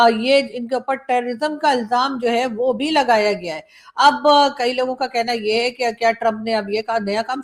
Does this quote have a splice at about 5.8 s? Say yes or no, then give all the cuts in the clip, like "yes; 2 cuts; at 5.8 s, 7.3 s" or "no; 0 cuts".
no; 0 cuts